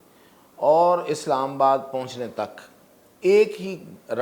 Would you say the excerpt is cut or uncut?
uncut